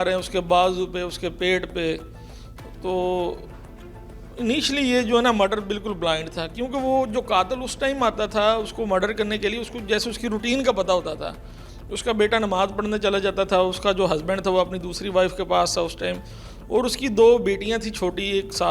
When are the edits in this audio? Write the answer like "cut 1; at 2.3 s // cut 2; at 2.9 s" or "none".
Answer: none